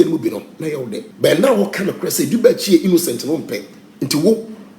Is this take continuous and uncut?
no; 1 cut; at 1.0 s

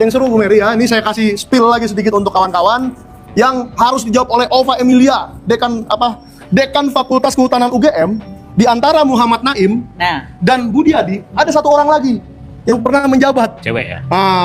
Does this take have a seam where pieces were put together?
no; 0 cuts

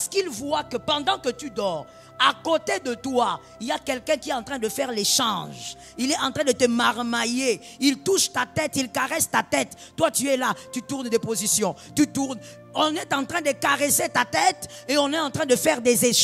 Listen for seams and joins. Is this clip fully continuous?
yes; 0 cuts

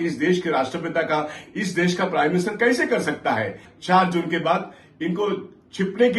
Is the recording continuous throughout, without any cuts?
no; 1 cut; at 3.6 s

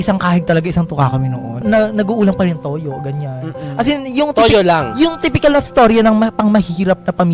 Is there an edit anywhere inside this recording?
yes; 1 cut; at 1.6 s

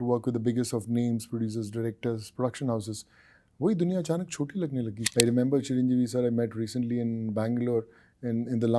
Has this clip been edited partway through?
yes; 1 cut; at 5.0 s

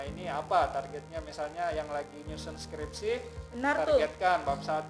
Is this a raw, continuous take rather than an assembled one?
yes; 0 cuts

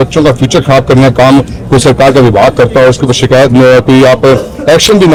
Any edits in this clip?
no; 0 cuts

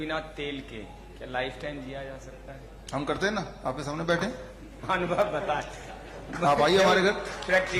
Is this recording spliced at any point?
no; 0 cuts

